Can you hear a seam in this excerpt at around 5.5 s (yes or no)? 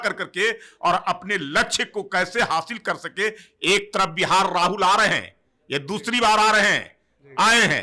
no